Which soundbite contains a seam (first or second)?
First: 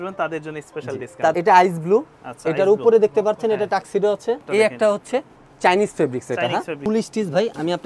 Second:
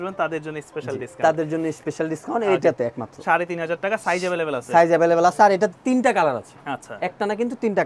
first